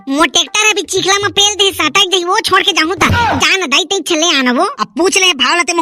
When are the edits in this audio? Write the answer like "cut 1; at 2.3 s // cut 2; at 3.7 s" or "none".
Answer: cut 1; at 4.7 s